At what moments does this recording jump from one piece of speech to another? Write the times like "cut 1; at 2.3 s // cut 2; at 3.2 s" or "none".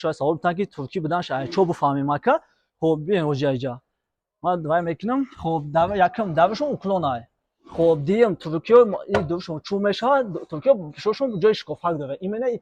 none